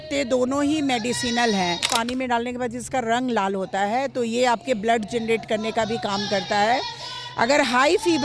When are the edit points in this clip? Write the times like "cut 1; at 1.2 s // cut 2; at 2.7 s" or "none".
cut 1; at 1.9 s